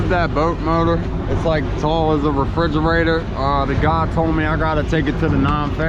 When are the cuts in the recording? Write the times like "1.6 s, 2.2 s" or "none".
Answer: none